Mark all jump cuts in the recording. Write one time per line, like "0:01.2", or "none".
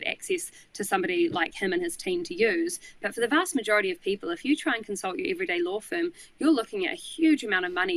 none